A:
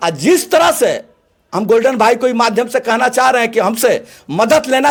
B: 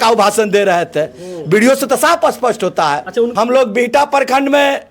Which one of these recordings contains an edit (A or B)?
B